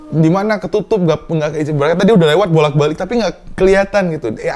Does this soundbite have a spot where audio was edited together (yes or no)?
no